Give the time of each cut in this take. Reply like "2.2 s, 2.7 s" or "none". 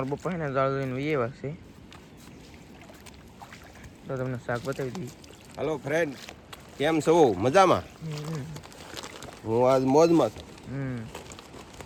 none